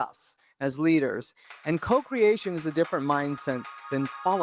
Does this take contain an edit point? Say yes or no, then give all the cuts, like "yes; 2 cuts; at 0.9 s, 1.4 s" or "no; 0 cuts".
no; 0 cuts